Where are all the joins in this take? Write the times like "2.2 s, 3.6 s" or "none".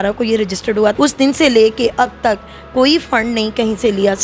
0.9 s

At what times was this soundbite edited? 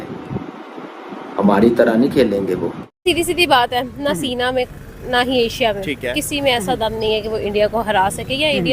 2.8 s

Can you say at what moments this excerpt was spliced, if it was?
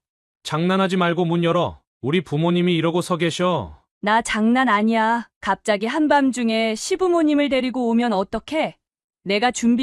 none

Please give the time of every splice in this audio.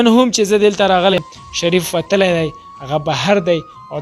1.1 s

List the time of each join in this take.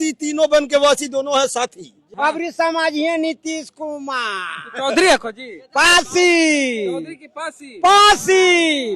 2.0 s

